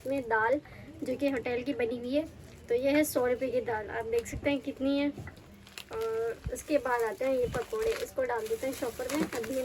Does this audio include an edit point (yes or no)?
no